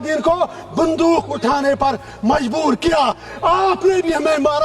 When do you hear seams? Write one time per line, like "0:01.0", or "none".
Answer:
0:03.3